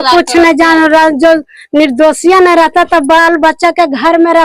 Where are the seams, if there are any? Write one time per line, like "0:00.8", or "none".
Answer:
none